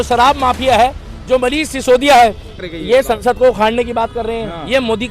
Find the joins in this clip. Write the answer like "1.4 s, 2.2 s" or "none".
2.6 s